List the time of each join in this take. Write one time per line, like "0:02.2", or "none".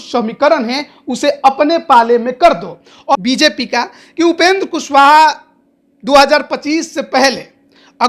0:03.2